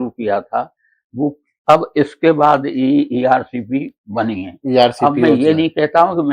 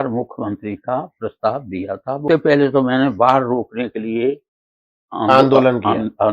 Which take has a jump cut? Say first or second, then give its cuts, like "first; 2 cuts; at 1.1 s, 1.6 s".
second; 1 cut; at 2.2 s